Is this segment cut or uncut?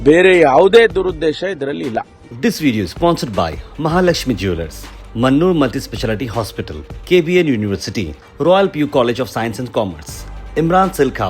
cut